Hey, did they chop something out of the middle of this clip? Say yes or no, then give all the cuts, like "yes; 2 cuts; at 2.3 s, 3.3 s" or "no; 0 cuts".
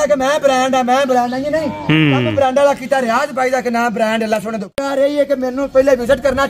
yes; 1 cut; at 4.8 s